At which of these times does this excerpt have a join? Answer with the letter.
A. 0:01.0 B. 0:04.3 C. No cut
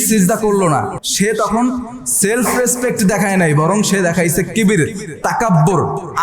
A